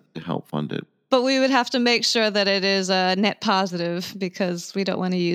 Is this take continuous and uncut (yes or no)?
no